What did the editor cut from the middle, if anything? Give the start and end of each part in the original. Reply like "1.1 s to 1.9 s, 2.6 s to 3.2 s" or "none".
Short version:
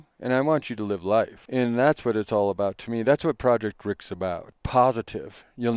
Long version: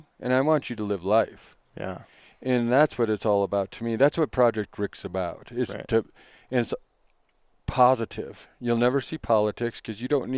1.4 s to 2.3 s, 5.4 s to 7.5 s